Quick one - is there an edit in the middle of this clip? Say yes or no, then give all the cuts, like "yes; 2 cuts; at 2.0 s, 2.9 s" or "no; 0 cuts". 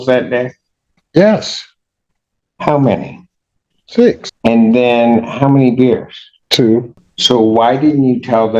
no; 0 cuts